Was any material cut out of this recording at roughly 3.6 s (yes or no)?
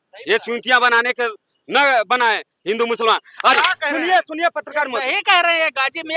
yes